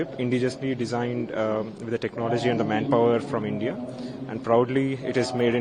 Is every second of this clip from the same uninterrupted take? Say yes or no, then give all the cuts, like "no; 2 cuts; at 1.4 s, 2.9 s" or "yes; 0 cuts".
yes; 0 cuts